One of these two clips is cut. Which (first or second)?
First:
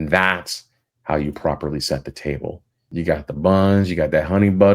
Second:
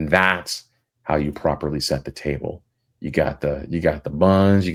first